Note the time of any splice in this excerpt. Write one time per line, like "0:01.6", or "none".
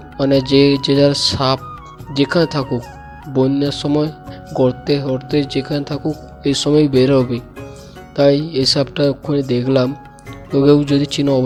none